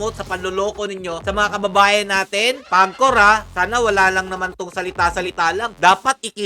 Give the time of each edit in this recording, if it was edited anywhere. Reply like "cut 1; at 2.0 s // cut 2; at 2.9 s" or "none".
cut 1; at 1.2 s // cut 2; at 2.6 s